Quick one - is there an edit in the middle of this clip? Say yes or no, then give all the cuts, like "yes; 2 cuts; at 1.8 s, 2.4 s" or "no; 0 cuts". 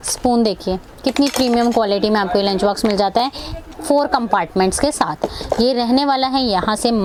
no; 0 cuts